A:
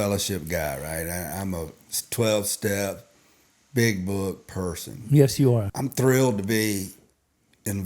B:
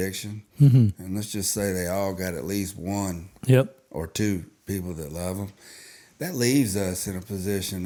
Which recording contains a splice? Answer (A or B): A